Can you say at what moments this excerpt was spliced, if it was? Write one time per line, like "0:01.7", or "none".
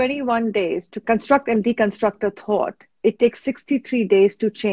0:00.9